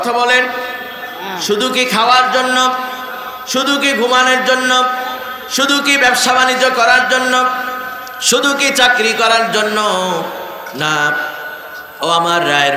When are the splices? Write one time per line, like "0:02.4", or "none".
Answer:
none